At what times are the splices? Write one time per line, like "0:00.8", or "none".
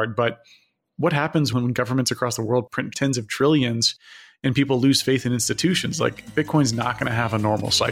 0:01.5
0:02.9